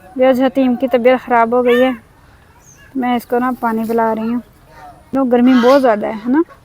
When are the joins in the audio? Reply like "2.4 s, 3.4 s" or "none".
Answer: 5.1 s